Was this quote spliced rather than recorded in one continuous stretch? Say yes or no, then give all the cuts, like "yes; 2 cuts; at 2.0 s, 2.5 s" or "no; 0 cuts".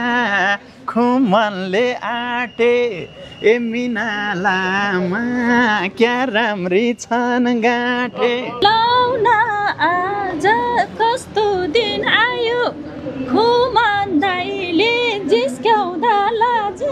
yes; 1 cut; at 8.6 s